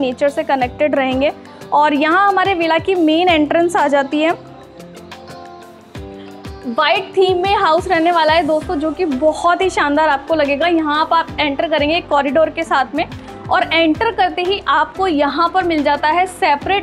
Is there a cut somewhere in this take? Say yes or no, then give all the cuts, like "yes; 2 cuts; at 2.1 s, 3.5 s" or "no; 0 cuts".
no; 0 cuts